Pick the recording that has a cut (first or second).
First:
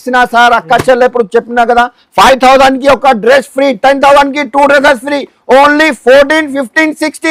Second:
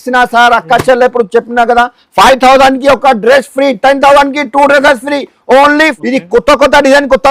second